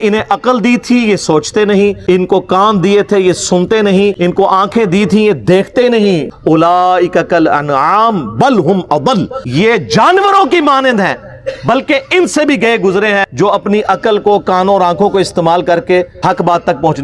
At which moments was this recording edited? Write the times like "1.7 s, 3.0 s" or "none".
2.0 s, 4.2 s, 6.3 s, 9.4 s, 13.3 s, 16.1 s